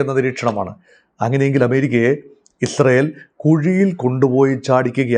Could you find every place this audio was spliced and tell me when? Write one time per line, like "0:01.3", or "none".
none